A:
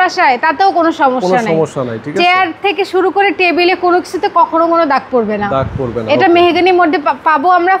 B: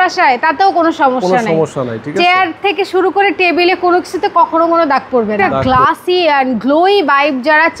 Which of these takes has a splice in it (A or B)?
B